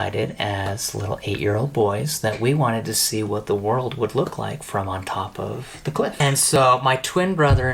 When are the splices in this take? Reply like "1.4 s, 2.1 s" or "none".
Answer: 6.6 s